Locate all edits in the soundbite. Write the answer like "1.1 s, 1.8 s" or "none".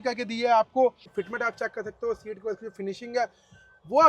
1.0 s

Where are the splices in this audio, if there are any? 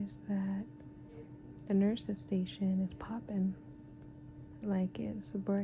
none

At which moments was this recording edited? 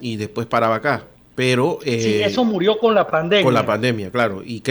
1.2 s

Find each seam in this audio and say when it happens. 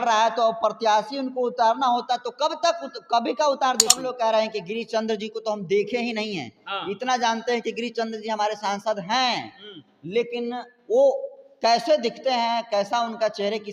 4.1 s

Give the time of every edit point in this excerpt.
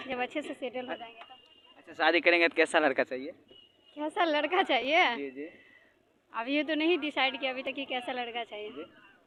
none

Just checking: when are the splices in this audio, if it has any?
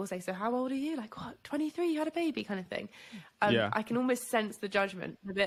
none

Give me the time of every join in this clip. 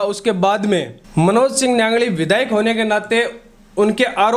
1.0 s

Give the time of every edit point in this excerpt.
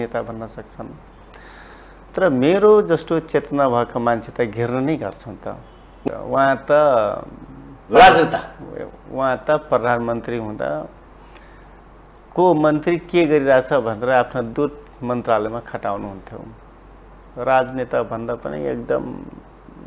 6.1 s

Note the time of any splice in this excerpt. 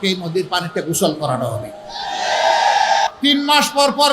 3.1 s

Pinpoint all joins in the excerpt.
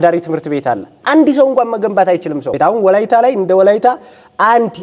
2.5 s

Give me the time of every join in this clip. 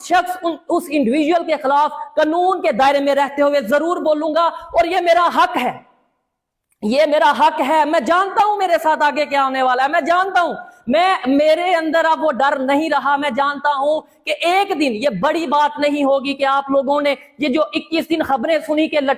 none

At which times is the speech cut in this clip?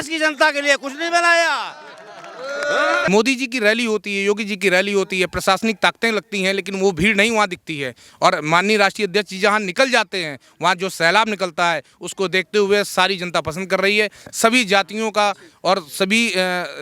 3.0 s

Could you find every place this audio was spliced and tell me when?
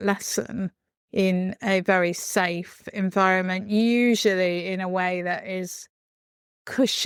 none

